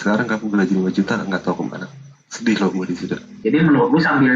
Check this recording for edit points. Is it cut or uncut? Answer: cut